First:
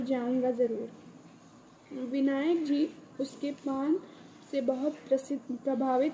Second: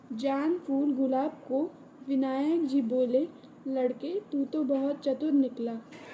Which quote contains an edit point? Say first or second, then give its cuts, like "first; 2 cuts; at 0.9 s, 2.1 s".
first; 1 cut; at 3.8 s